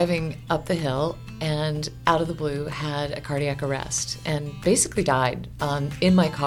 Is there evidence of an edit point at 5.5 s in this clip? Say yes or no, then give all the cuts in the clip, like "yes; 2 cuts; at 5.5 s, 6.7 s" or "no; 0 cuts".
yes; 1 cut; at 5.5 s